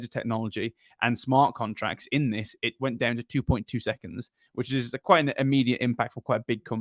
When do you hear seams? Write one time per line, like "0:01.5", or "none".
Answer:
none